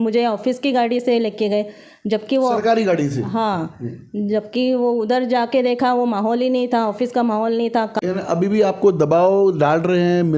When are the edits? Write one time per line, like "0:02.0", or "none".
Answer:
0:08.0